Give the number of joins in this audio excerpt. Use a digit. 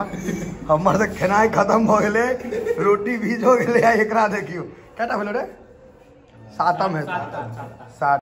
0